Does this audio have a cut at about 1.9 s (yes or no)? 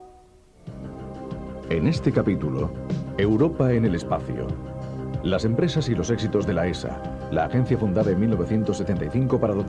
no